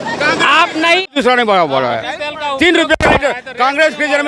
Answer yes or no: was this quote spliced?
yes